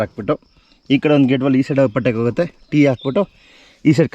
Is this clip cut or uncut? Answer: uncut